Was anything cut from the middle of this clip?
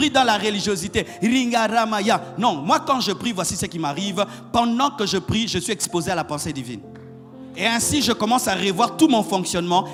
no; 0 cuts

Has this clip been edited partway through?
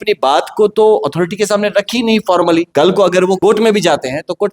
yes; 2 cuts; at 2.7 s, 3.4 s

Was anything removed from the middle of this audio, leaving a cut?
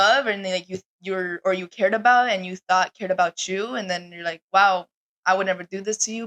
no; 0 cuts

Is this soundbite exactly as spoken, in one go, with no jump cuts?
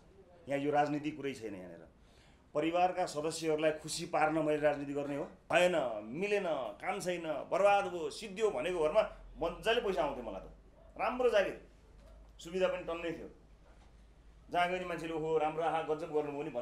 no; 1 cut; at 5.4 s

